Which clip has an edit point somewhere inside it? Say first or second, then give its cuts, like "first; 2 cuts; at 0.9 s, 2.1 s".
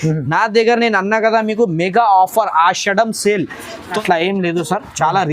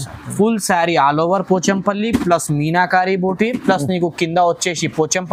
first; 1 cut; at 4.0 s